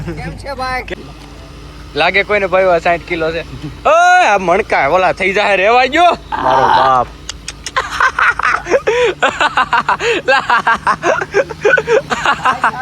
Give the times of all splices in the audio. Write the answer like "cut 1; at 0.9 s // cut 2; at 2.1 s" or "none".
cut 1; at 0.9 s